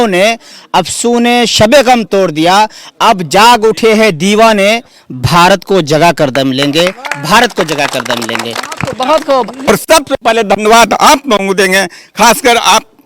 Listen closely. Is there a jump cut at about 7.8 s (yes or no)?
no